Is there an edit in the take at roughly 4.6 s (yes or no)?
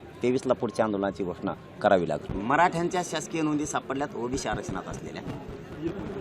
no